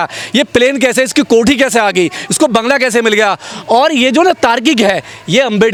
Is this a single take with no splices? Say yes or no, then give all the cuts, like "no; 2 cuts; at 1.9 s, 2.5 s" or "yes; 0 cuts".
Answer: yes; 0 cuts